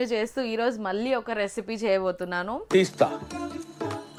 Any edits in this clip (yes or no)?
no